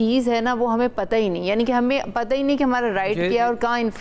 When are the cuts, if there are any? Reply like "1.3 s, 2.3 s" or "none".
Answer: none